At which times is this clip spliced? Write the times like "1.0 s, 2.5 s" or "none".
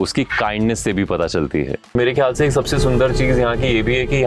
1.9 s